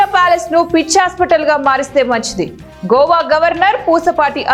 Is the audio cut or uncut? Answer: uncut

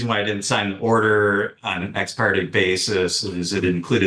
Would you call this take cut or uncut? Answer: uncut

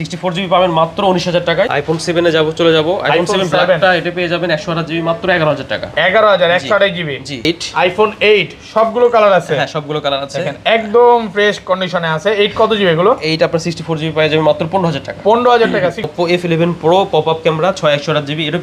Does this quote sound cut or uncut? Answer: cut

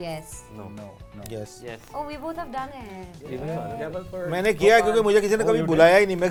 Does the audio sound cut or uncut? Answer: uncut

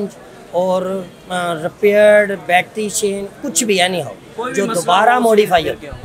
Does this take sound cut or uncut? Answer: uncut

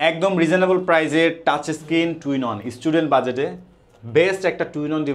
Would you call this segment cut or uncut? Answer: uncut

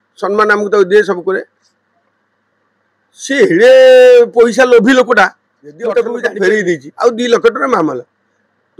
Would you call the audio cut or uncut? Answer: cut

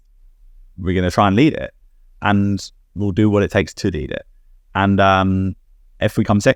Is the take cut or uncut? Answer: uncut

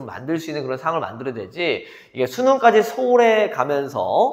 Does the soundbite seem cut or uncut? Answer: uncut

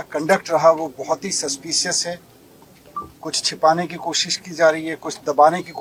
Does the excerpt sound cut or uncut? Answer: uncut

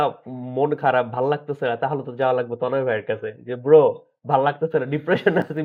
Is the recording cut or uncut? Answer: uncut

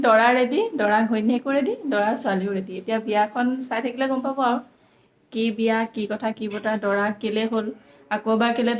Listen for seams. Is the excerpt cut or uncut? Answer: uncut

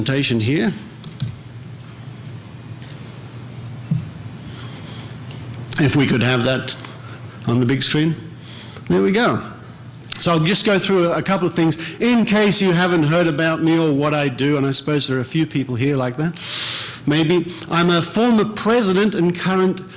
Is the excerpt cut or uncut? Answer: uncut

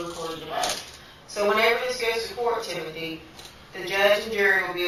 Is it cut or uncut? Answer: uncut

